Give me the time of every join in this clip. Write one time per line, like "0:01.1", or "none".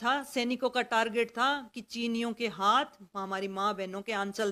none